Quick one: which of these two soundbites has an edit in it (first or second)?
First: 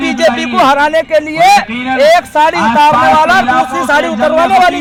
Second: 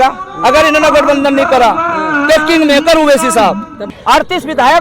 second